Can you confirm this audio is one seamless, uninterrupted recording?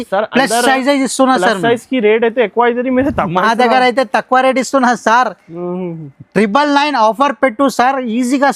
yes; 0 cuts

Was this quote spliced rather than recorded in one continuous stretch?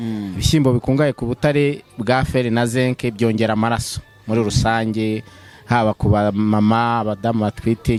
no; 0 cuts

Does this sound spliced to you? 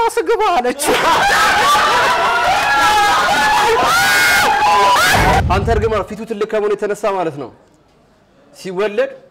yes; 1 cut; at 5.4 s

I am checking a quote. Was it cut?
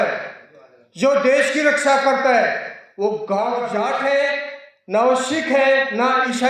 yes; 1 cut; at 3.7 s

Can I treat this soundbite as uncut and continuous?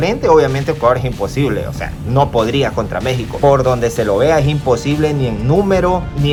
yes; 0 cuts

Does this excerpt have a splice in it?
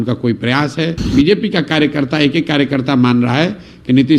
yes; 1 cut; at 1.0 s

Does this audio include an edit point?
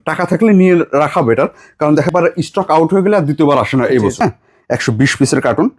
yes; 2 cuts; at 2.1 s, 4.2 s

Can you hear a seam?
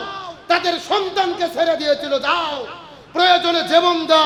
no; 0 cuts

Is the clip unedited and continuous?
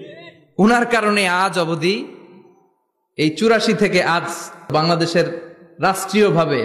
no; 1 cut; at 4.7 s

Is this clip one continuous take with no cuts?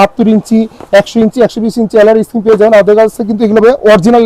yes; 0 cuts

